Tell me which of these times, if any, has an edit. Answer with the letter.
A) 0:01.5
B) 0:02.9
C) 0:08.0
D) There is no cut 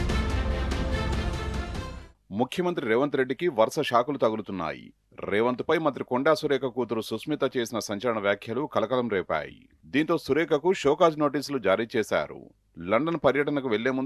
A